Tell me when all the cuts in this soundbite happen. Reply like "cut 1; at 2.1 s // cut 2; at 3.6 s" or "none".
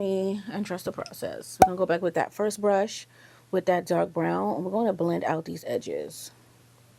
none

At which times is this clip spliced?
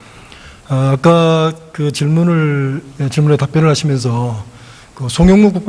cut 1; at 2.2 s

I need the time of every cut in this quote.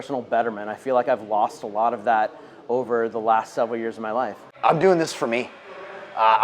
cut 1; at 4.4 s

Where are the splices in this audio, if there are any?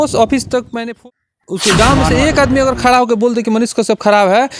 cut 1; at 1.0 s

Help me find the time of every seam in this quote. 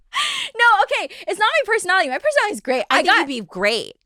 none

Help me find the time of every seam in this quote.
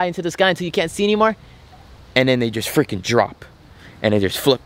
none

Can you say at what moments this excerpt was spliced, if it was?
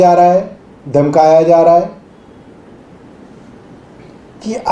none

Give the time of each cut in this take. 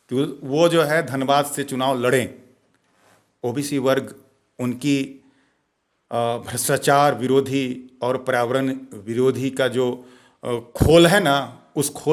none

